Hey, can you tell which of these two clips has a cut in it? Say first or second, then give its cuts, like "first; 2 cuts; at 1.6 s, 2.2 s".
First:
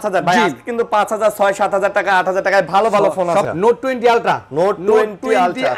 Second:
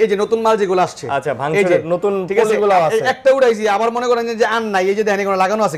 first; 1 cut; at 3.5 s